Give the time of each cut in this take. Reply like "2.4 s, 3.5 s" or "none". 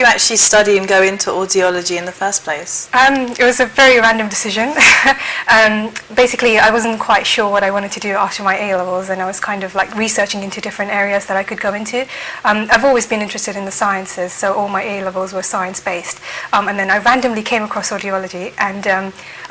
13.0 s